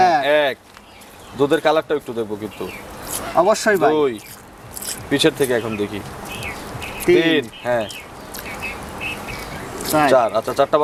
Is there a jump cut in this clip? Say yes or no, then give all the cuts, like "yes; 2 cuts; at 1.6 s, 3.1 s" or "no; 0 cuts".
no; 0 cuts